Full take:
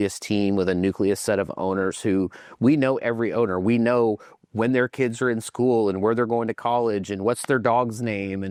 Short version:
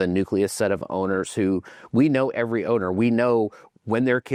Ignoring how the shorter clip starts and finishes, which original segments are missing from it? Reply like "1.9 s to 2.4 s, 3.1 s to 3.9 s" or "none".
none